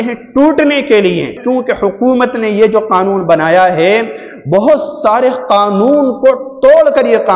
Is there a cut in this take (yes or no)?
yes